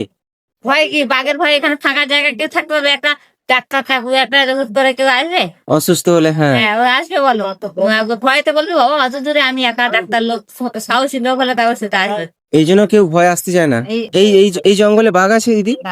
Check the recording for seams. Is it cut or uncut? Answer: cut